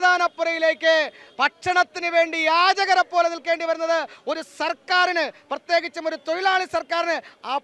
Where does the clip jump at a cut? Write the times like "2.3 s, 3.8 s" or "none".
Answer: none